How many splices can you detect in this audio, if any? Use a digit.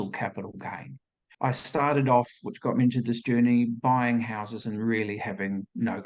1